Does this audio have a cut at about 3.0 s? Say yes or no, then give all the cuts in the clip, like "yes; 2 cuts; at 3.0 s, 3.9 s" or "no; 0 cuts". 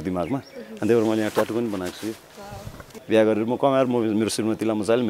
yes; 1 cut; at 3.0 s